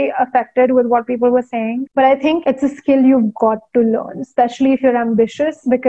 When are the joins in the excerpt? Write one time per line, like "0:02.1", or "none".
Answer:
none